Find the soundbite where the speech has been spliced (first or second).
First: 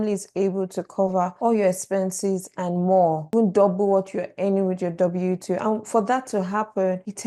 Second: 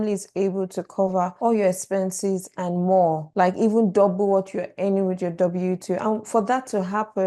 first